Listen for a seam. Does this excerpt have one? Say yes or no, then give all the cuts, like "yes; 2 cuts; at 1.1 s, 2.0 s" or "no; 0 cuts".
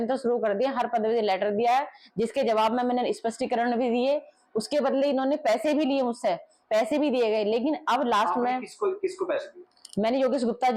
no; 0 cuts